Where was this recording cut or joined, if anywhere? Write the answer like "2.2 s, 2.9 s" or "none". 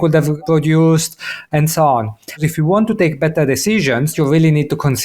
1.3 s, 2.4 s, 4.1 s